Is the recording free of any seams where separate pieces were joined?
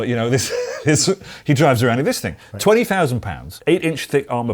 no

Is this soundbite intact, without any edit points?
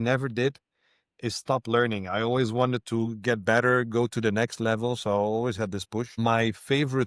no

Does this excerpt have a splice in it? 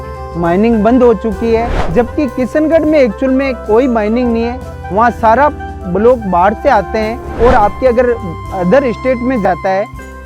yes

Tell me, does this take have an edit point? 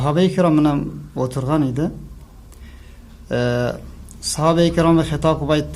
yes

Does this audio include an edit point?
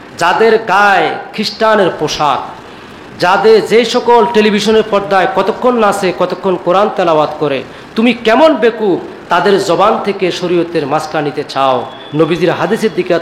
no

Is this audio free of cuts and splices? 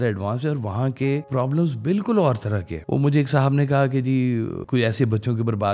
no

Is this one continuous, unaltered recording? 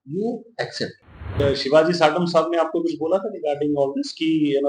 no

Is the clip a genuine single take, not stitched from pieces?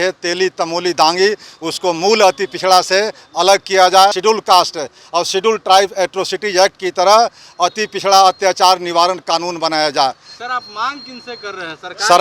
no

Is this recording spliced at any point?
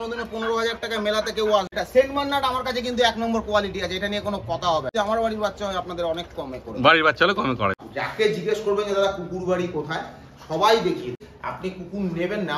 yes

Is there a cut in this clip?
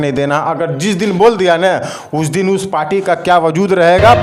no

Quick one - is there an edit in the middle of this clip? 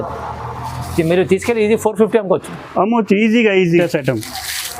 yes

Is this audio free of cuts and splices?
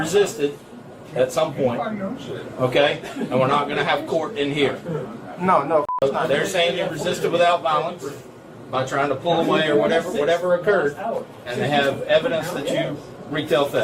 yes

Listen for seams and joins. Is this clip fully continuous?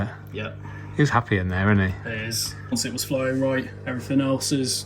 no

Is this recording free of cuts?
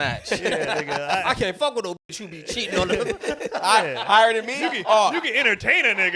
yes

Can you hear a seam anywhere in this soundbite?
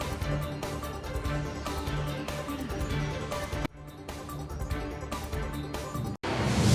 no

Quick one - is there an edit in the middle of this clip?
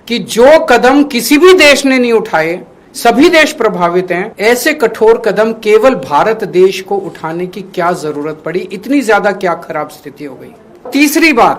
no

